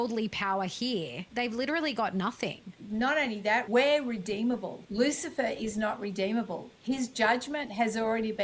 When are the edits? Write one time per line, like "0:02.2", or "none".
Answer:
0:01.2
0:02.8
0:03.7
0:04.8